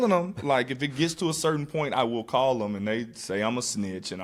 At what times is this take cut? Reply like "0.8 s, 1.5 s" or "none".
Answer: none